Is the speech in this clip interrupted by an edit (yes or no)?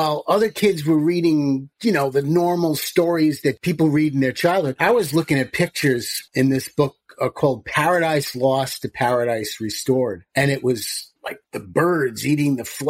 yes